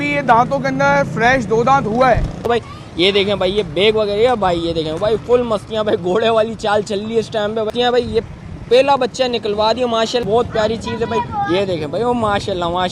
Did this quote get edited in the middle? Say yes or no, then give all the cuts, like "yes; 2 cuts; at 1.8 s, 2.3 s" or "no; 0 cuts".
yes; 3 cuts; at 2.5 s, 7.7 s, 10.2 s